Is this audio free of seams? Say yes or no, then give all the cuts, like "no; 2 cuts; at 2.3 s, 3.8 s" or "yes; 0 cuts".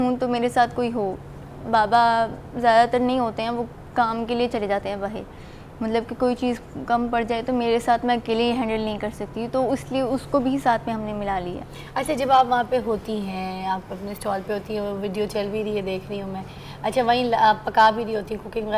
yes; 0 cuts